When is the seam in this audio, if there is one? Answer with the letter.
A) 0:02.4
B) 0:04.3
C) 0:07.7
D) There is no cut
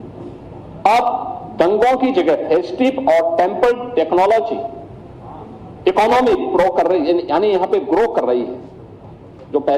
A